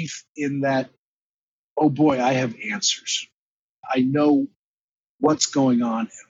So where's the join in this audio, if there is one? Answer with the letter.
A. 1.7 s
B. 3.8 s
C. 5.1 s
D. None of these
B